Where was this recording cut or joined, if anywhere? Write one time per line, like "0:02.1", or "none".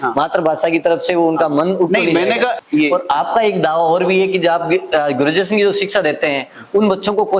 0:02.6